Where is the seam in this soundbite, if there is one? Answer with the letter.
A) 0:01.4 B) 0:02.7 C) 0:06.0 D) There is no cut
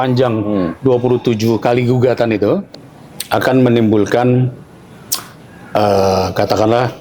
B